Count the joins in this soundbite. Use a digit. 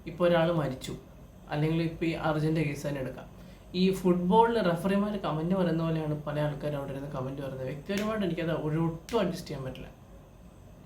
0